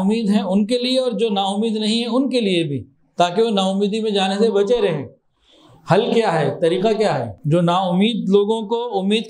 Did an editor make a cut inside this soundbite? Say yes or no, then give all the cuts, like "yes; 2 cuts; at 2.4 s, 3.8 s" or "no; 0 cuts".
yes; 1 cut; at 7.3 s